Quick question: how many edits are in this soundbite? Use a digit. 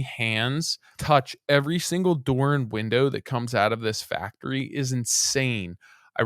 1